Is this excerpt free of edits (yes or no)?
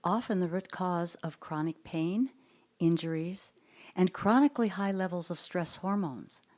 yes